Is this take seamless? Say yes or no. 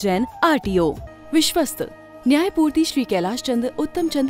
no